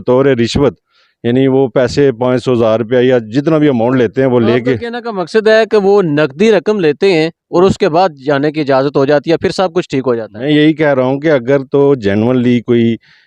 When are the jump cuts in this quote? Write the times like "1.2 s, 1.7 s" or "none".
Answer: none